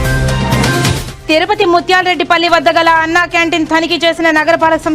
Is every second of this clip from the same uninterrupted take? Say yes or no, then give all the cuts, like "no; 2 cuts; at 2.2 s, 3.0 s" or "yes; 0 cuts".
no; 1 cut; at 1.1 s